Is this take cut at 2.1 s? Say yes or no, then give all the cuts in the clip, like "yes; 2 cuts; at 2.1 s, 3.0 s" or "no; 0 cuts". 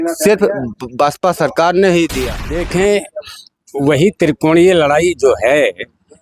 yes; 1 cut; at 2.1 s